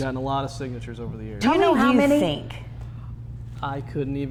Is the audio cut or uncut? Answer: uncut